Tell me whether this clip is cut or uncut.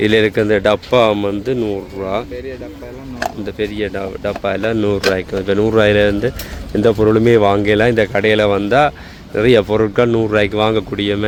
uncut